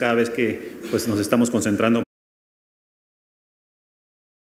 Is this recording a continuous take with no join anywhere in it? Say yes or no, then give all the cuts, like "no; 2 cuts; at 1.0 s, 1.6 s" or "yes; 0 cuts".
yes; 0 cuts